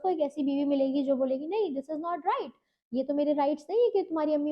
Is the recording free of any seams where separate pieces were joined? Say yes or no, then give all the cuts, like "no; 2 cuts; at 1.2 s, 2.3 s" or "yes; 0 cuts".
yes; 0 cuts